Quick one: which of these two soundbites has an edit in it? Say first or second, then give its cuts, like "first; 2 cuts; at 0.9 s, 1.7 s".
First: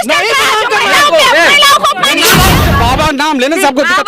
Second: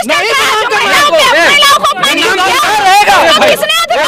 first; 1 cut; at 2.6 s